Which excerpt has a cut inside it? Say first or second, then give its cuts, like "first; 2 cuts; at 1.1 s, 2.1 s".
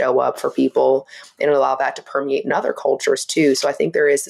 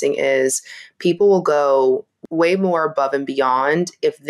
second; 1 cut; at 2.1 s